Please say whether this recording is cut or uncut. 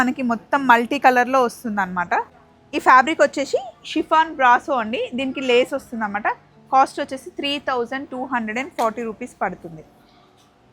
uncut